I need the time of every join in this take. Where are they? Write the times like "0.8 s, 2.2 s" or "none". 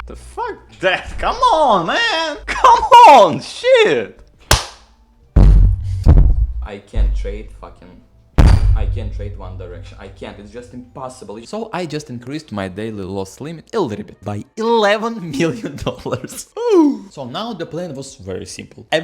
6.0 s, 11.4 s, 17.1 s